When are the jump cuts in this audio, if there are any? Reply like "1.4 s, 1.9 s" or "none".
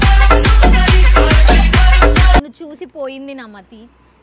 2.5 s